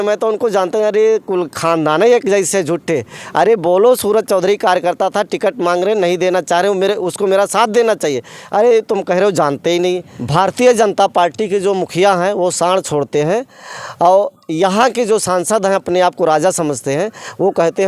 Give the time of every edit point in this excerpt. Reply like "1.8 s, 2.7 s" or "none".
10.1 s